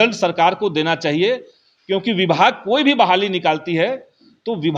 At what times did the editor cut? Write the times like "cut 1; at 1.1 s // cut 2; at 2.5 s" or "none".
none